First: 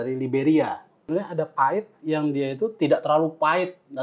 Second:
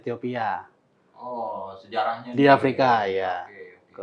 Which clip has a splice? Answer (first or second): first